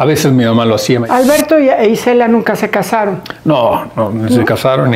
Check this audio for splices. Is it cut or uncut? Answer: cut